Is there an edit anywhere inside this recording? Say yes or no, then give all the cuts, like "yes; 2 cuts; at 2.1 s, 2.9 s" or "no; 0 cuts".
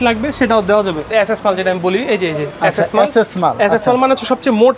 yes; 1 cut; at 1.1 s